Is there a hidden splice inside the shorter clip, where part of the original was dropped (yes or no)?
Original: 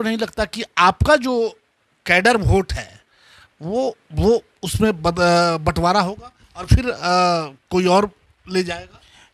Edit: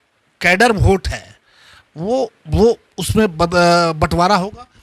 no